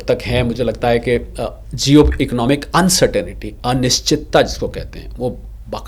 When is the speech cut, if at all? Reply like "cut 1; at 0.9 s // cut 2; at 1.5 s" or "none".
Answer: none